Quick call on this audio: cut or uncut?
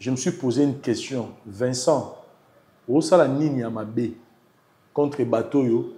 uncut